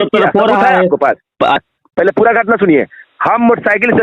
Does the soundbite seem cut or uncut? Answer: cut